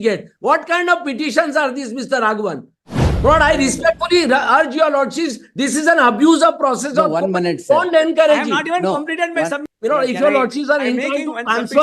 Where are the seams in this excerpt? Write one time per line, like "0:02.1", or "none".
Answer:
0:09.6